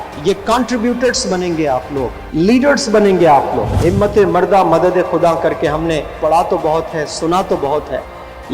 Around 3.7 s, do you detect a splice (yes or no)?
yes